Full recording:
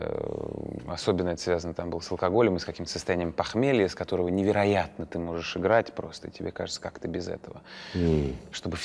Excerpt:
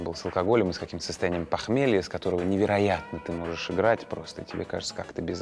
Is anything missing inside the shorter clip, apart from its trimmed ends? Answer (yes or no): no